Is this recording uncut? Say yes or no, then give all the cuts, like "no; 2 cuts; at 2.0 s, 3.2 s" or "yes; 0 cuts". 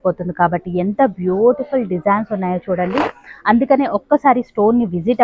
yes; 0 cuts